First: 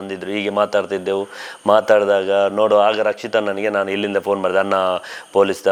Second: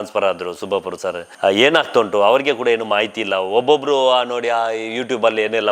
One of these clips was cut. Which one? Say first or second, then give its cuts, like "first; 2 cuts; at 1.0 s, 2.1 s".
second; 1 cut; at 1.3 s